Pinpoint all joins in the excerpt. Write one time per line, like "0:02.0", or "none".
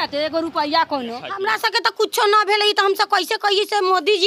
0:01.3